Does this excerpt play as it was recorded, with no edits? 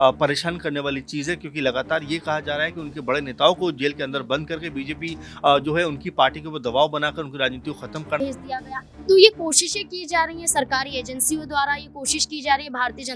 no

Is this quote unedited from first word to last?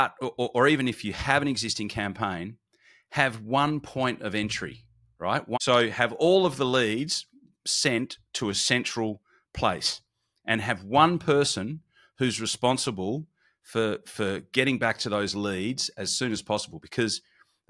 no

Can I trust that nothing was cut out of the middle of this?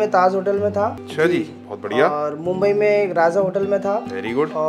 no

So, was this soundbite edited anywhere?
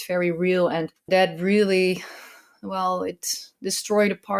yes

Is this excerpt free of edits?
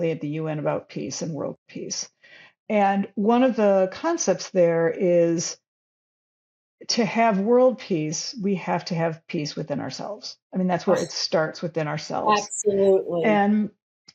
yes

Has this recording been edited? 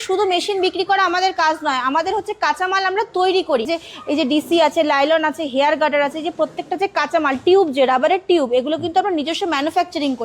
yes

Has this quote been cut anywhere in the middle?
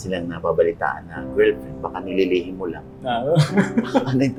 no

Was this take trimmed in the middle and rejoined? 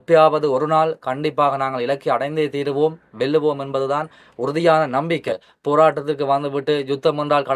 yes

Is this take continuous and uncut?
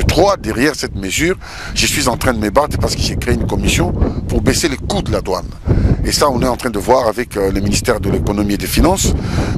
yes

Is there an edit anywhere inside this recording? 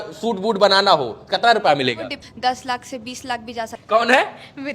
yes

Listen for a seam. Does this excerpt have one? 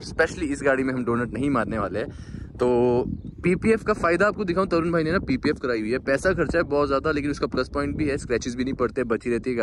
no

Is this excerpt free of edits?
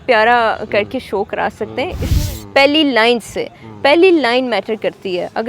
no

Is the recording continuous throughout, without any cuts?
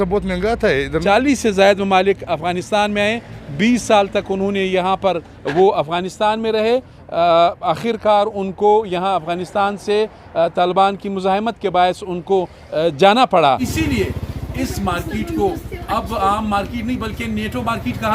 no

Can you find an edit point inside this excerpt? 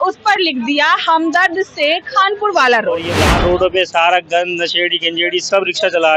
yes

